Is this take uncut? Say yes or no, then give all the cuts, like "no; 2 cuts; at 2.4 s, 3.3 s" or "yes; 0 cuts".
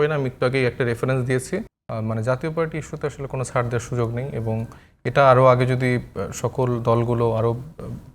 no; 1 cut; at 1.8 s